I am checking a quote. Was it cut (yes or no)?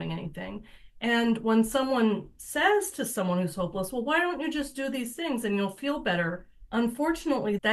no